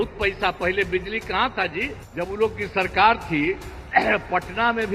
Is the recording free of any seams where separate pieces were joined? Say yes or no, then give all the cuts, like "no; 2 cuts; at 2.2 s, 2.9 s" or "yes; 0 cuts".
no; 1 cut; at 2.0 s